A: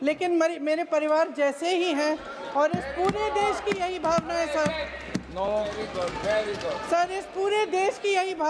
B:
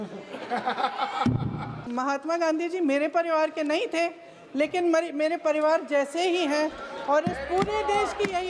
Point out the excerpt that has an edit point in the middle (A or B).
B